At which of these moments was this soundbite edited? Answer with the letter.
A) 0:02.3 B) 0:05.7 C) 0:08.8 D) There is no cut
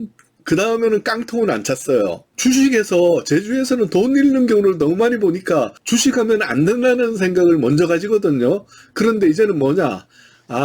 A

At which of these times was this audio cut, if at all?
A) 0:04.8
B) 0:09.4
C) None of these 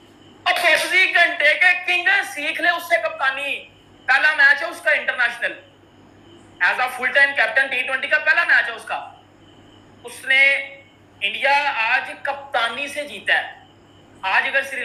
C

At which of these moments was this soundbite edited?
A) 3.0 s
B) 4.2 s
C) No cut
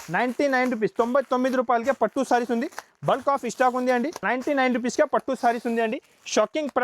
B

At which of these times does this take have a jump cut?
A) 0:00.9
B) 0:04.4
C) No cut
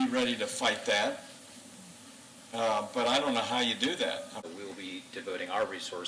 B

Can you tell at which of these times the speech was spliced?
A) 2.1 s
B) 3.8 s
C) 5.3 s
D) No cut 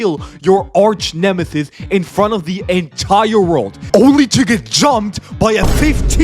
B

